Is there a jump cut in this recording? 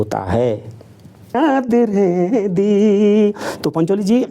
yes; 1 cut; at 1.4 s

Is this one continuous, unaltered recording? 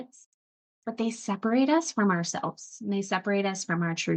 yes; 0 cuts

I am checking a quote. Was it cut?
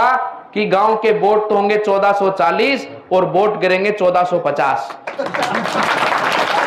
no; 0 cuts

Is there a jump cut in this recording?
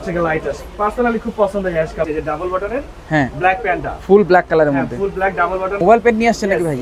yes; 2 cuts; at 2.0 s, 5.8 s

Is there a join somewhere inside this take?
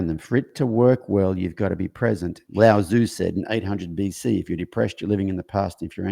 yes; 1 cut; at 2.4 s

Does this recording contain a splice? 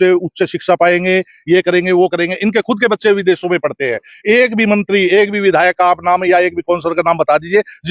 no; 0 cuts

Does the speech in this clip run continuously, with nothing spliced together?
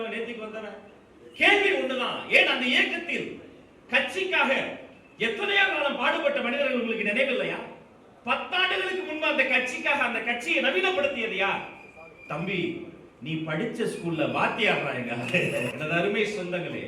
no; 1 cut; at 15.7 s

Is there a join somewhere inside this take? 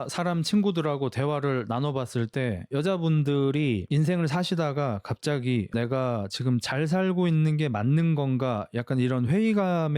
yes; 1 cut; at 2.6 s

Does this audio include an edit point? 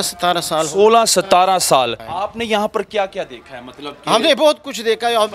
yes; 1 cut; at 2.1 s

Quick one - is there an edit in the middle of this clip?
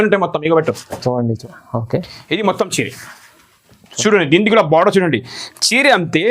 yes; 1 cut; at 1.4 s

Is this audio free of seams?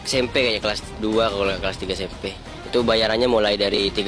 yes; 0 cuts

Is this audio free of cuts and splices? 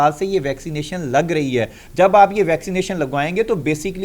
yes; 0 cuts

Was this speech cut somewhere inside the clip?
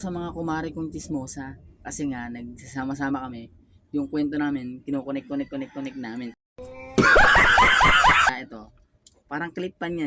yes; 1 cut; at 8.3 s

